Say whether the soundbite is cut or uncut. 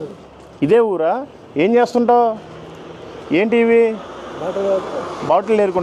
uncut